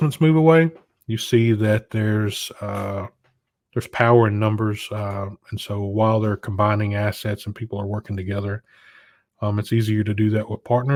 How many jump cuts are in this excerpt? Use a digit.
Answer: 0